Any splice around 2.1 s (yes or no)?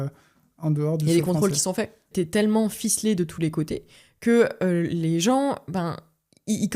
yes